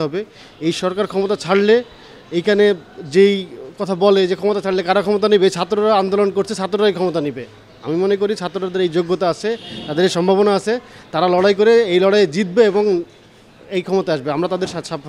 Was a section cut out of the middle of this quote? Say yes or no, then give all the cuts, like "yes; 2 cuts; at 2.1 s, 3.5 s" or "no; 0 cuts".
no; 0 cuts